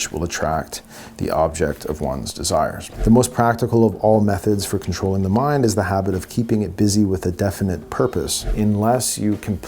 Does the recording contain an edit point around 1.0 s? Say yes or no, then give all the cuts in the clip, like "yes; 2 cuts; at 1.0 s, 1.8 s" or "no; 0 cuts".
no; 2 cuts; at 2.9 s, 8.4 s